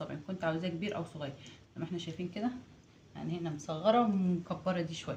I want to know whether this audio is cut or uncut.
uncut